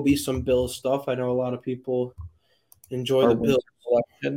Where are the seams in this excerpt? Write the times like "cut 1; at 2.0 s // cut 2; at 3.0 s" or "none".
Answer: none

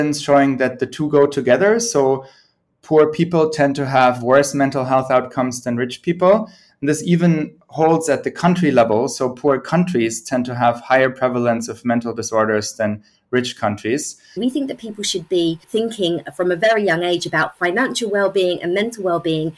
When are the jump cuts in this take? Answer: cut 1; at 14.4 s // cut 2; at 15.6 s

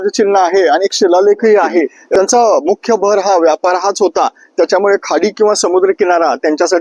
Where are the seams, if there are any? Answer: cut 1; at 2.0 s

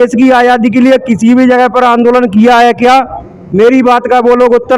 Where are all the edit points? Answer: none

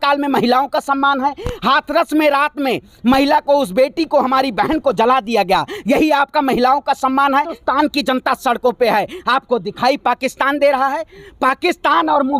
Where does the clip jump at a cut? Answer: cut 1; at 7.6 s

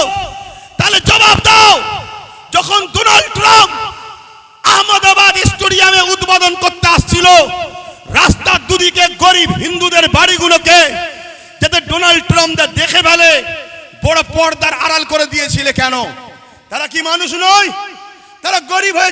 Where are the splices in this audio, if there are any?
none

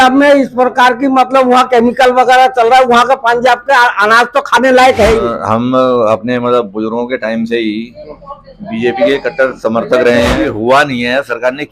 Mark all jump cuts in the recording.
cut 1; at 5.3 s // cut 2; at 10.4 s

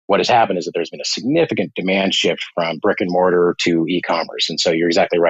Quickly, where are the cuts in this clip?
none

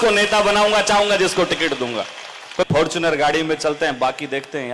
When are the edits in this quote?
cut 1; at 2.7 s

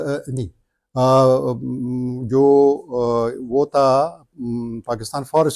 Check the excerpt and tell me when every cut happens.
none

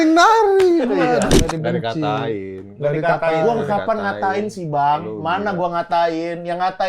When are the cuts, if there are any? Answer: cut 1; at 1.3 s

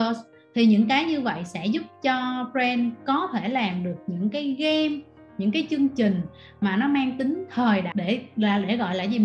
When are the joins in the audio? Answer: cut 1; at 7.9 s

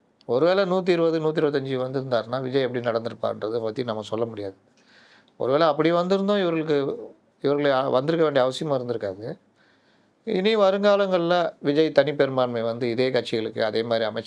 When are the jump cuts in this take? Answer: none

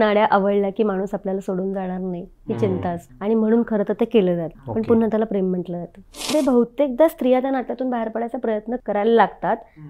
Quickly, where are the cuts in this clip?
cut 1; at 3.1 s // cut 2; at 4.6 s // cut 3; at 6.3 s // cut 4; at 8.8 s

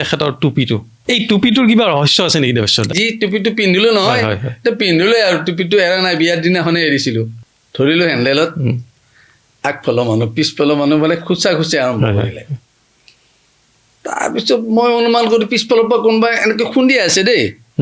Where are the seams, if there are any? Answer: cut 1; at 0.9 s // cut 2; at 2.9 s // cut 3; at 7.4 s

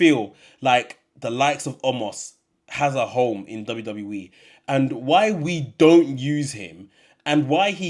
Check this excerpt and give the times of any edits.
none

